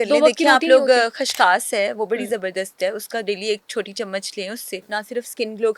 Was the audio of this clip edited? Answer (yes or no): yes